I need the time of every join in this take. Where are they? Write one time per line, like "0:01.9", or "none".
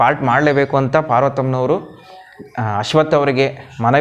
none